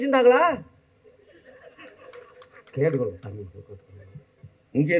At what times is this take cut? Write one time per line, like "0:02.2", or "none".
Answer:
none

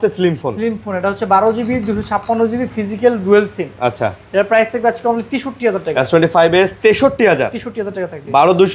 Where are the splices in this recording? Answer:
none

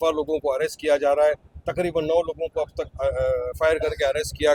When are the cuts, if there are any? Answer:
none

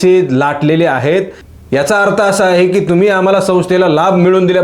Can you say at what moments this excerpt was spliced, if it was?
0:01.4

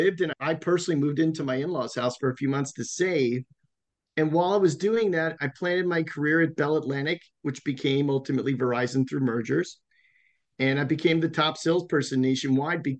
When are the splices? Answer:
none

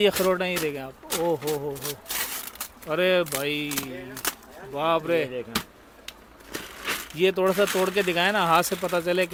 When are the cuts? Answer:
none

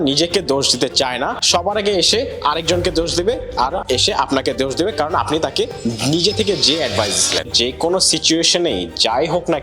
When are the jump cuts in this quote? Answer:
0:07.5

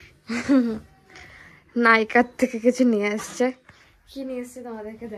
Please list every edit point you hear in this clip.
none

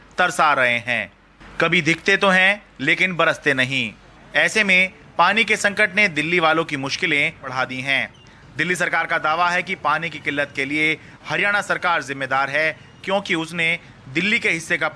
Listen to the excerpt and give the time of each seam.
0:07.5

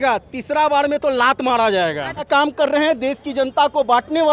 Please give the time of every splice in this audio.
0:02.3

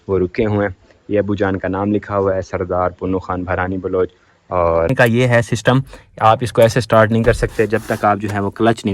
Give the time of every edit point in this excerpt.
0:04.9

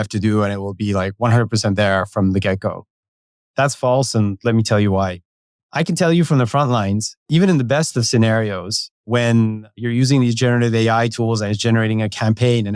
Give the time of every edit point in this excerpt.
0:05.6
0:07.3
0:09.1
0:09.8

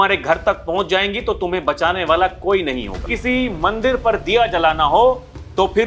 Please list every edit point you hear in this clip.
0:03.1

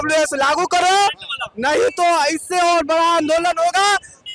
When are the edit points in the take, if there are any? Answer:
none

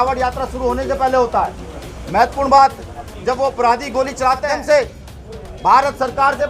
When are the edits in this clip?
0:04.4

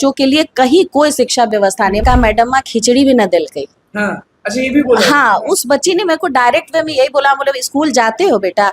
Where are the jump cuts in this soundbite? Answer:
0:02.0

